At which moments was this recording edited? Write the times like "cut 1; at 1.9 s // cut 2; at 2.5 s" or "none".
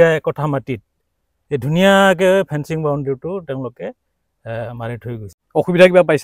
cut 1; at 5.3 s

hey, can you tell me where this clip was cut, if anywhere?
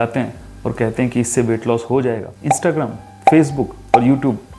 cut 1; at 2.3 s

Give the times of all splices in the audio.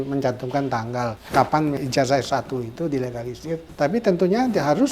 cut 1; at 1.2 s // cut 2; at 1.8 s // cut 3; at 3.7 s

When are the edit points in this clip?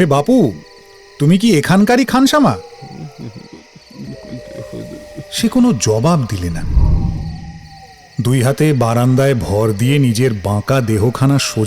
cut 1; at 4.1 s

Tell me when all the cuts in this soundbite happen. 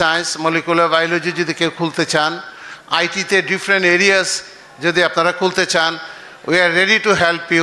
none

